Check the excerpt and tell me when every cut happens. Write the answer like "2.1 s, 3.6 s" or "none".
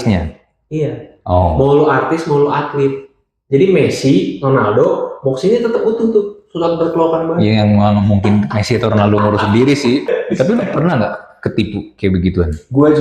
10.1 s